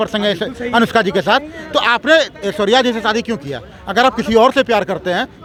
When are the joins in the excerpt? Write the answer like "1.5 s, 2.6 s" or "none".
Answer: none